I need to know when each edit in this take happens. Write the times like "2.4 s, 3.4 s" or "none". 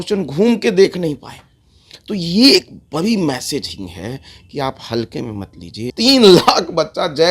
5.9 s

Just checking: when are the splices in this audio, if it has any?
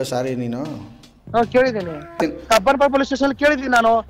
2.2 s

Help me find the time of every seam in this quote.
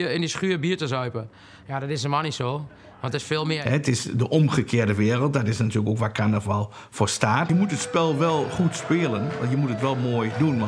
3.6 s, 7.5 s

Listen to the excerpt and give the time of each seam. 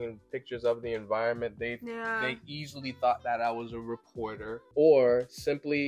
4.6 s

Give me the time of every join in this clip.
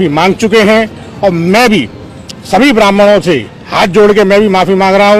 none

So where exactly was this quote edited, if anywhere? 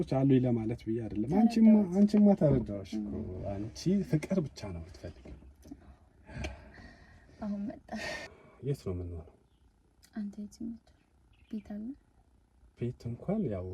8.3 s

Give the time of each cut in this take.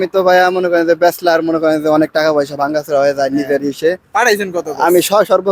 none

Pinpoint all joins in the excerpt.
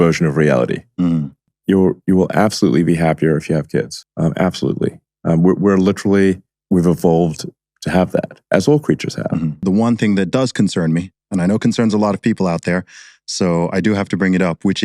1.6 s, 9.6 s

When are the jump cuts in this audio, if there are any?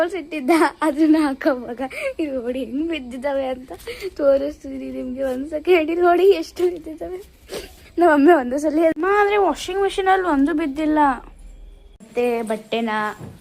8.9 s

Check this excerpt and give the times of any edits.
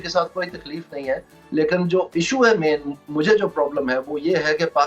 none

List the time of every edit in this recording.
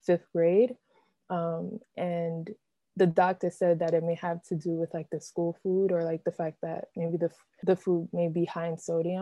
7.5 s

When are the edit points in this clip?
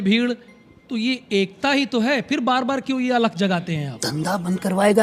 4.1 s

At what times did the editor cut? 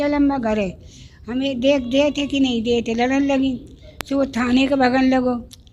none

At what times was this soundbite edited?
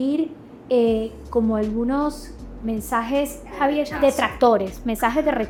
none

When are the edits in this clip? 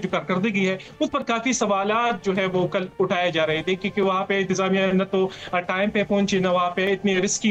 none

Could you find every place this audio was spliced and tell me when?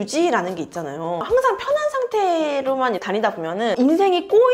1.2 s

